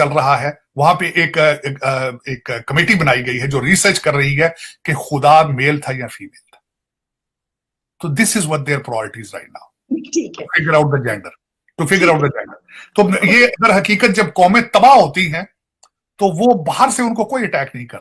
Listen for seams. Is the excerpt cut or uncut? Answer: uncut